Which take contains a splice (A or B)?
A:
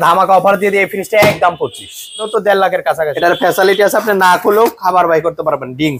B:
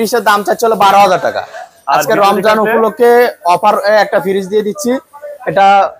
A